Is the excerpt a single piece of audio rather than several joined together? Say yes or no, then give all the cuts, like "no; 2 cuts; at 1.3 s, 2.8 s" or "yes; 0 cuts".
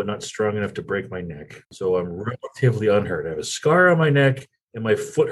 no; 1 cut; at 1.7 s